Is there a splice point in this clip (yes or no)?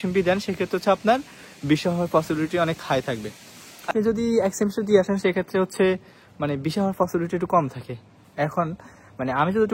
yes